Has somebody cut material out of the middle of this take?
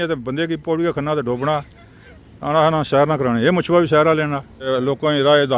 yes; 1 cut; at 4.7 s

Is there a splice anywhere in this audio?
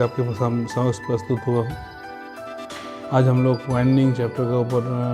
yes; 2 cuts; at 1.7 s, 3.1 s

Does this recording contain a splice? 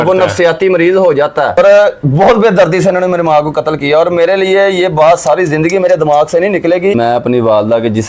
yes; 2 cuts; at 1.6 s, 7.0 s

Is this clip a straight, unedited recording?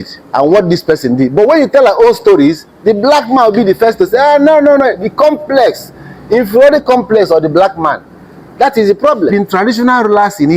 no; 1 cut; at 9.3 s

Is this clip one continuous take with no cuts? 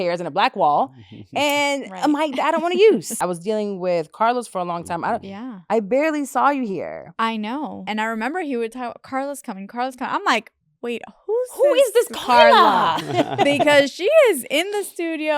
no; 2 cuts; at 3.1 s, 7.8 s

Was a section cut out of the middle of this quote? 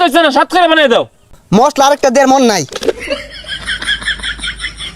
yes; 2 cuts; at 1.3 s, 3.1 s

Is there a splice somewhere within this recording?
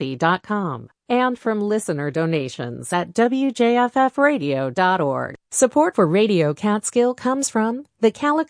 yes; 1 cut; at 5.4 s

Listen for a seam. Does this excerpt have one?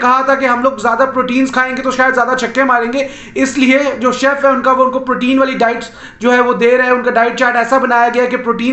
no; 0 cuts

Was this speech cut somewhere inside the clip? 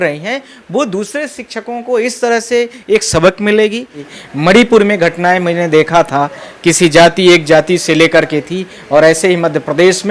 yes; 1 cut; at 4.0 s

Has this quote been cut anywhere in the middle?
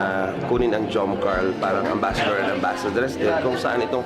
no; 0 cuts

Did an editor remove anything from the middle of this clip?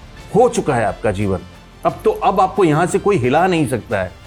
no; 0 cuts

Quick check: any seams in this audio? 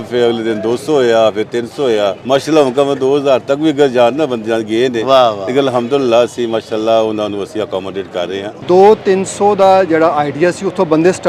yes; 2 cuts; at 2.2 s, 8.6 s

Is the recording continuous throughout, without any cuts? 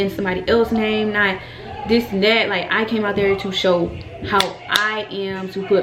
yes; 0 cuts

